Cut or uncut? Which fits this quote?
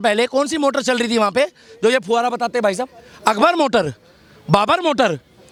uncut